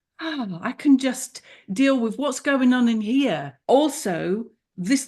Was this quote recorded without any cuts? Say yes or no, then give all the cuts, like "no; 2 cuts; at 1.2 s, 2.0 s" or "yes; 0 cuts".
no; 1 cut; at 3.5 s